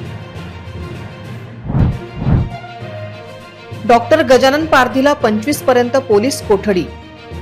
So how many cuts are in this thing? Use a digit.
1